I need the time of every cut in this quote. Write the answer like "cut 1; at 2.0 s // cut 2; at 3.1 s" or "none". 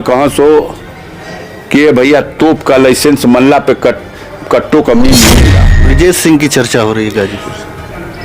cut 1; at 5.7 s